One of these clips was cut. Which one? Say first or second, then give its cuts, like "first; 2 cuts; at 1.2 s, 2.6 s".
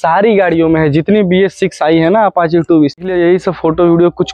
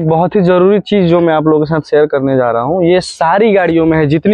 first; 1 cut; at 3.0 s